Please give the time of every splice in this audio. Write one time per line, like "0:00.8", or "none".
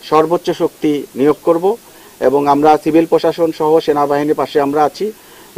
none

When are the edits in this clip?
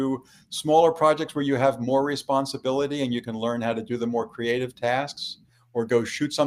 none

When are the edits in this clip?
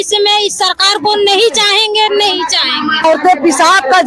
0:03.0

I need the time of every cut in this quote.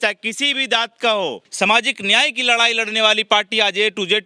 0:01.4

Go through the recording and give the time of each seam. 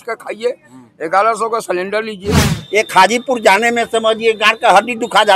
0:02.5

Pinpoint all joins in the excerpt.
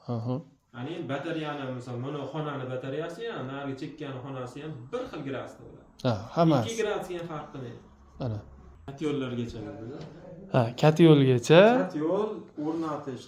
0:08.8

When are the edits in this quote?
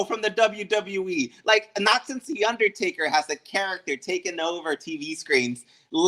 0:01.3

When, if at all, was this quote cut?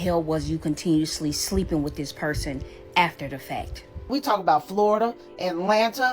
0:04.1

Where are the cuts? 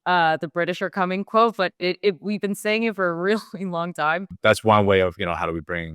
0:04.3

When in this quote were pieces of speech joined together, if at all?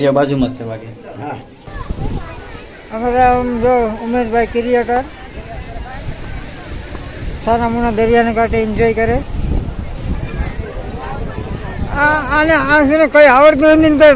0:01.6
0:10.2

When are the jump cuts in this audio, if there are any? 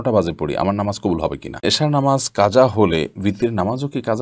0:01.6

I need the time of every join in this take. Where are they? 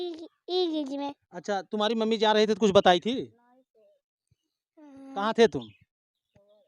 none

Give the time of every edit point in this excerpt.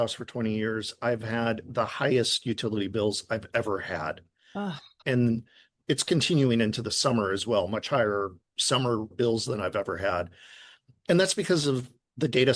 0:04.9
0:09.1

